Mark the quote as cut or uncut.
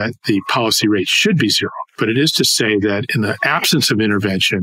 uncut